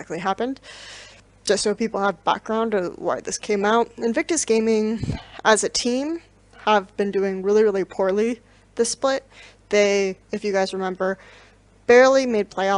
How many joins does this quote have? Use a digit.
1